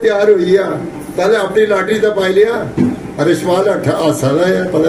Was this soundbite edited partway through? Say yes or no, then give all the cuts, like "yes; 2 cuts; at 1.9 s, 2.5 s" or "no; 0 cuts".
no; 0 cuts